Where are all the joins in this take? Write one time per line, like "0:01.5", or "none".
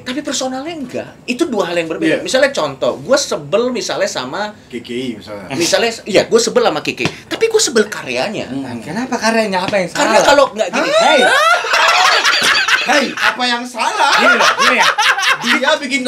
0:01.1